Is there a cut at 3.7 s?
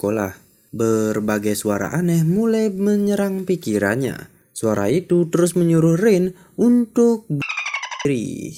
no; 0 cuts

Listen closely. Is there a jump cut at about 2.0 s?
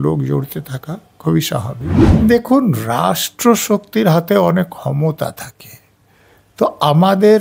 yes; 1 cut; at 2.0 s

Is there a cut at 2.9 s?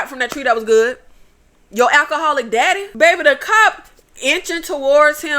yes; 1 cut; at 2.9 s

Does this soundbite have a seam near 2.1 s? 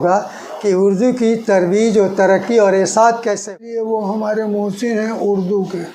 no; 1 cut; at 3.5 s

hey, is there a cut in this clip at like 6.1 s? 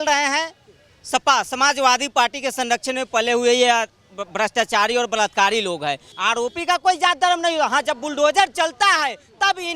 yes; 1 cut; at 6.1 s

